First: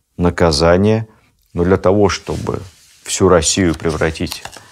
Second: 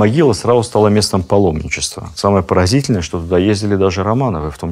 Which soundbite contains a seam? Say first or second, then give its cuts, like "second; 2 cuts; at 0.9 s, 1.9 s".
first; 1 cut; at 1.1 s